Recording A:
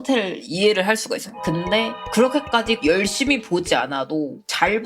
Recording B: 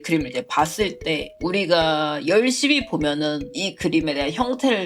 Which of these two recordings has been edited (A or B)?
A